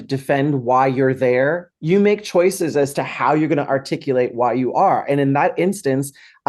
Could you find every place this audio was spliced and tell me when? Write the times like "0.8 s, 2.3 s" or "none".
1.7 s